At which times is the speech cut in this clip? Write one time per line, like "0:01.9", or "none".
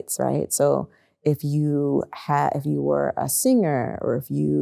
none